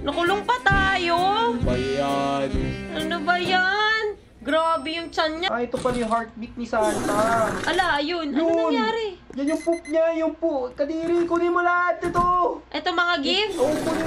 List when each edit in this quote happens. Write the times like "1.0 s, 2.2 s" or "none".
5.4 s